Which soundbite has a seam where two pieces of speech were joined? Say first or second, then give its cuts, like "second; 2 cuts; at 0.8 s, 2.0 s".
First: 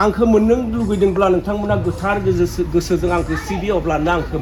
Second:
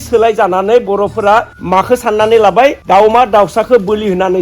second; 2 cuts; at 1.6 s, 2.8 s